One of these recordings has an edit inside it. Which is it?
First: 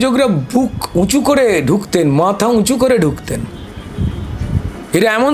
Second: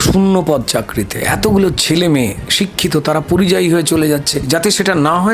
second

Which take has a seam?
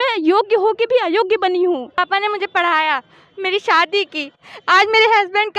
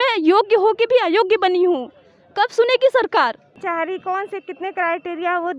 first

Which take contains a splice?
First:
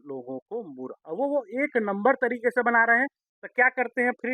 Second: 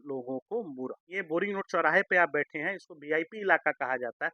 second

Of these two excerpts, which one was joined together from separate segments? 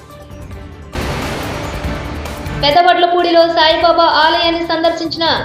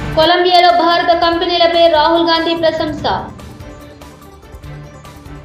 first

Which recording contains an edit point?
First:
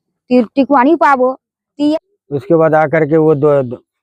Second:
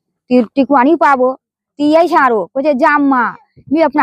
first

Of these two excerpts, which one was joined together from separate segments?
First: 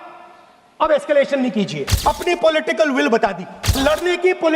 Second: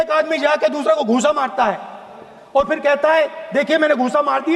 first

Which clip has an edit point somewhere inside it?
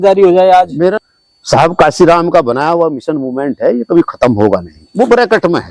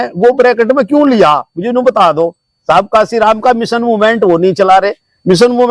first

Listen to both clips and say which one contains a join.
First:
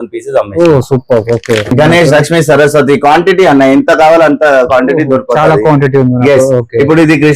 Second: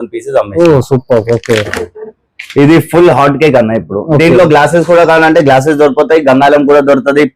first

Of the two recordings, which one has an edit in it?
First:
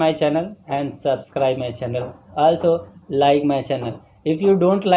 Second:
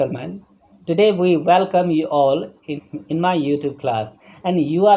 second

